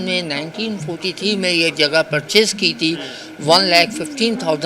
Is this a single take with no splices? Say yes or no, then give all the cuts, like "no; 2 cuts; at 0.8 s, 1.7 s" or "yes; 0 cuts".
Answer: yes; 0 cuts